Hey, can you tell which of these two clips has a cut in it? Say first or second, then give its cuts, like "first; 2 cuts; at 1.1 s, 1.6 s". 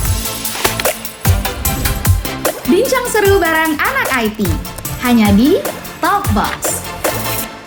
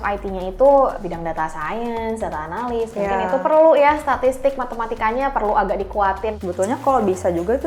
second; 2 cuts; at 1.0 s, 6.3 s